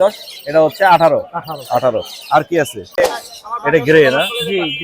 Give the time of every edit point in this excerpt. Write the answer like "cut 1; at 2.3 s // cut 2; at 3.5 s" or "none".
cut 1; at 3.0 s